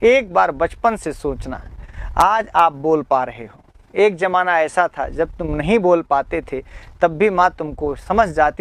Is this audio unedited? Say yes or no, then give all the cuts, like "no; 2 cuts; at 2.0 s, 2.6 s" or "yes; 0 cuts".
yes; 0 cuts